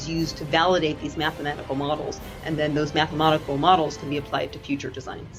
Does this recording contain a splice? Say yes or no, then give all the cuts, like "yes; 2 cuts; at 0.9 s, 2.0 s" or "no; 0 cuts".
no; 0 cuts